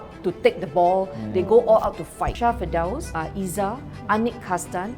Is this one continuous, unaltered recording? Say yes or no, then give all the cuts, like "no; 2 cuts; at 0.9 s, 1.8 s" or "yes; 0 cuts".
no; 2 cuts; at 2.3 s, 3.1 s